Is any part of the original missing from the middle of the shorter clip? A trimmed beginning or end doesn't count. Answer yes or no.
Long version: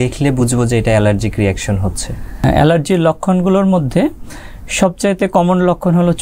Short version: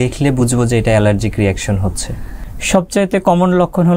yes